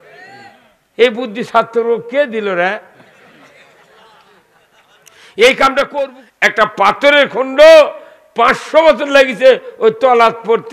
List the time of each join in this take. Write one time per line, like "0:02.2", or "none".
0:06.1